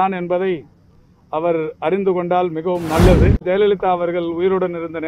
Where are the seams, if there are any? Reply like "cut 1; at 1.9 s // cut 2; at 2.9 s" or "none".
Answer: cut 1; at 3.4 s